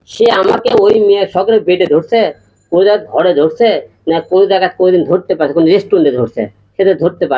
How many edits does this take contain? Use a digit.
0